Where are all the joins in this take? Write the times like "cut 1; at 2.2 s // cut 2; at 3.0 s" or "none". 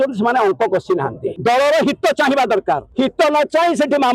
cut 1; at 1.4 s // cut 2; at 2.9 s